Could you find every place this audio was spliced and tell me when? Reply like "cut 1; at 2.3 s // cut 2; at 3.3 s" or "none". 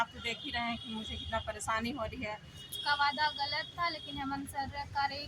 cut 1; at 2.7 s